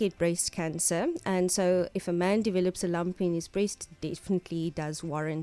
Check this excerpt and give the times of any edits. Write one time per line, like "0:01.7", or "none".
none